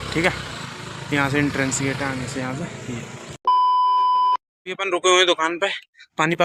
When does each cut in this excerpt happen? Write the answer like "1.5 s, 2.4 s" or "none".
3.4 s, 4.6 s